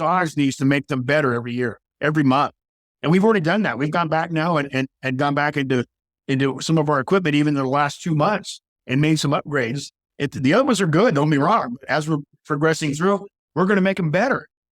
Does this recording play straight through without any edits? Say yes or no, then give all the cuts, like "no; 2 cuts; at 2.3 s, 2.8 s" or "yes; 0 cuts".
yes; 0 cuts